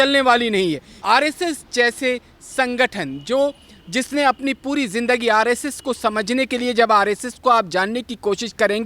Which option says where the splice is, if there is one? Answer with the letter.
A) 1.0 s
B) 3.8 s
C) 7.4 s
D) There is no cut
A